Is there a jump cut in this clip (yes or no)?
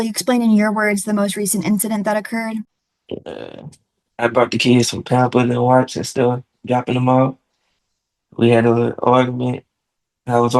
yes